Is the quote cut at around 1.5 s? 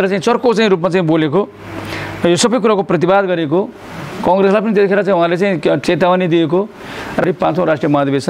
no; 2 cuts; at 5.8 s, 7.2 s

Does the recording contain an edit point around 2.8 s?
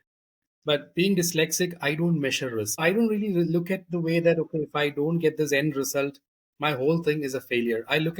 yes; 1 cut; at 2.8 s

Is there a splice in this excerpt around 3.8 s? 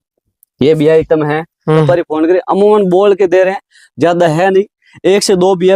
no; 1 cut; at 1.9 s

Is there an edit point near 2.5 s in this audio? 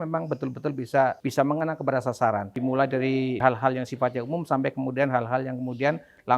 yes; 3 cuts; at 1.2 s, 2.5 s, 3.4 s

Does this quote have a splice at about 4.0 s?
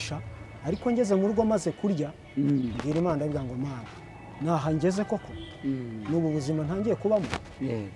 no; 0 cuts

